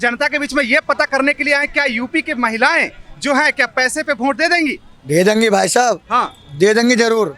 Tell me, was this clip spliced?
no; 0 cuts

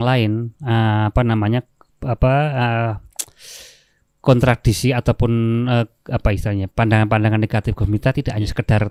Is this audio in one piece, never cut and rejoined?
yes; 0 cuts

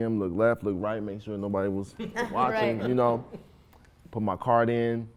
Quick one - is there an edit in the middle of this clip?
no; 0 cuts

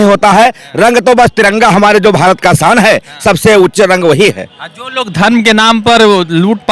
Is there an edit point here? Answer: no; 0 cuts

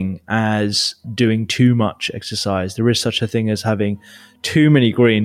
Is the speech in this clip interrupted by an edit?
yes; 1 cut; at 1.0 s

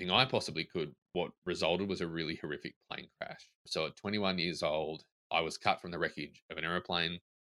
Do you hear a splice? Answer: yes; 1 cut; at 5.3 s

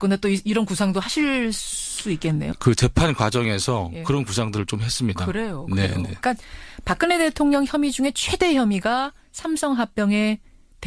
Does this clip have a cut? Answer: yes; 1 cut; at 8.3 s

